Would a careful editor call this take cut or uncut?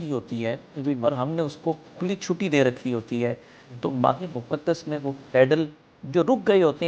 uncut